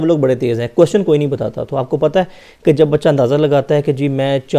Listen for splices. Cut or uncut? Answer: uncut